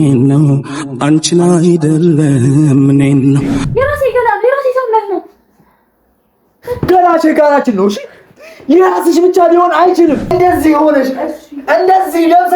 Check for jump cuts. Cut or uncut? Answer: cut